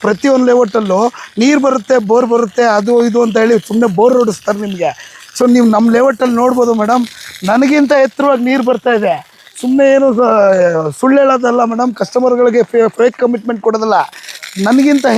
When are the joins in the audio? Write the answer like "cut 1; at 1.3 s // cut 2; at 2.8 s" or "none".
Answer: none

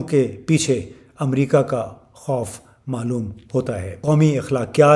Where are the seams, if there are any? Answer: cut 1; at 3.9 s

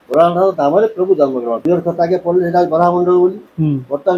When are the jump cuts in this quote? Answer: cut 1; at 1.6 s

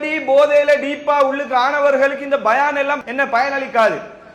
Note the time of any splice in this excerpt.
cut 1; at 3.0 s

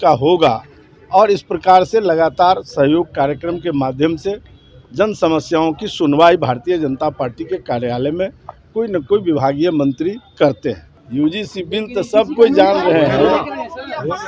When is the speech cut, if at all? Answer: cut 1; at 10.9 s

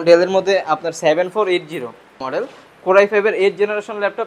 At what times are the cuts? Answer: cut 1; at 2.2 s

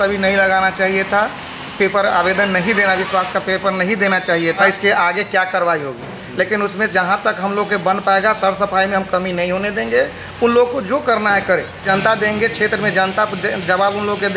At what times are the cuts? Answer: cut 1; at 4.6 s // cut 2; at 11.8 s

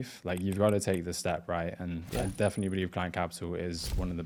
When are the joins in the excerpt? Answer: none

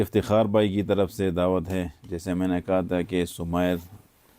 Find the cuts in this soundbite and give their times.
none

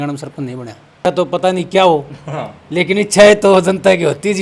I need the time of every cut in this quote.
cut 1; at 1.1 s

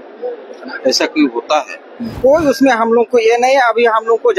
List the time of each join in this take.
cut 1; at 2.2 s

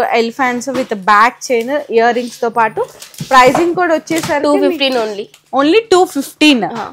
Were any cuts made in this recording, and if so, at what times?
none

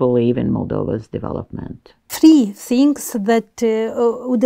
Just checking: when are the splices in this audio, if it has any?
cut 1; at 2.1 s

